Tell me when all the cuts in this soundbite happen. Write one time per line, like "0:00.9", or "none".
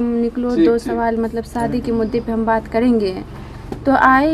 none